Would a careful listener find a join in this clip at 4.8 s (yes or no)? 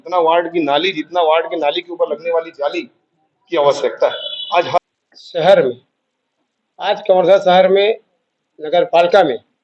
yes